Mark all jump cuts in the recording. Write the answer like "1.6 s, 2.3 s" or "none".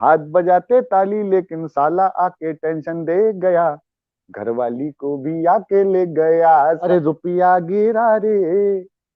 6.8 s